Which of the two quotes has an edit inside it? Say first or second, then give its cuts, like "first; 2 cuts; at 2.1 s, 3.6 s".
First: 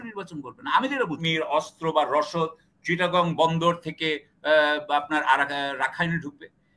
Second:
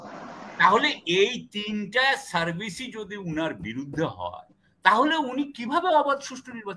first; 1 cut; at 1.2 s